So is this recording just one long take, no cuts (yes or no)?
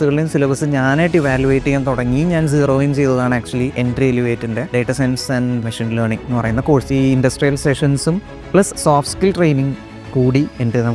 no